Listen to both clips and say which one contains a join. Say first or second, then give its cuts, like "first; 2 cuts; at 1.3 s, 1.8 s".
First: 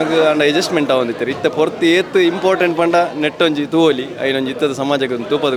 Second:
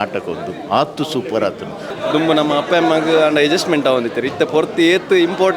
second; 1 cut; at 1.9 s